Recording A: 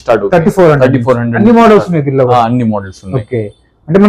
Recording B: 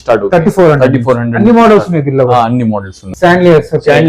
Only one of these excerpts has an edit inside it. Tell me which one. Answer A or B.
B